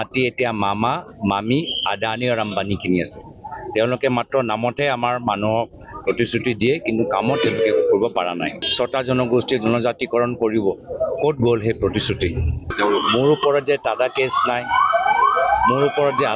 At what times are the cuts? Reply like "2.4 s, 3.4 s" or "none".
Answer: 8.7 s, 12.6 s